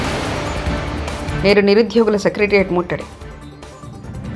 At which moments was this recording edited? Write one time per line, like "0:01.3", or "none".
0:01.3